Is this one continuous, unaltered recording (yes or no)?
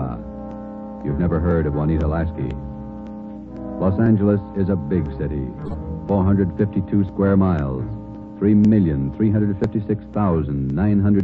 yes